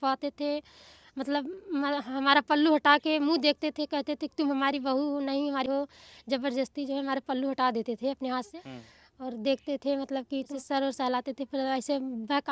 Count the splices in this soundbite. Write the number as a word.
three